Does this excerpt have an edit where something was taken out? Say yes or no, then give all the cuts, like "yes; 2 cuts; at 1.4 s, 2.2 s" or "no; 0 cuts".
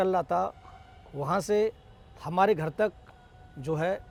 no; 0 cuts